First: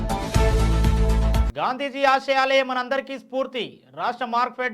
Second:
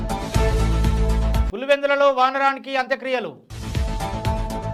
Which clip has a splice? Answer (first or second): first